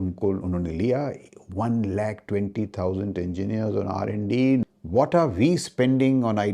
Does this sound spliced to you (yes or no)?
yes